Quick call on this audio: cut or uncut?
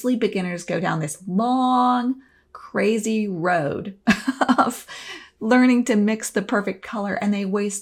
uncut